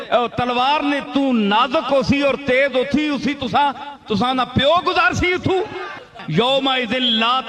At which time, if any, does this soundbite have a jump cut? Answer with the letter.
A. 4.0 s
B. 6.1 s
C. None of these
B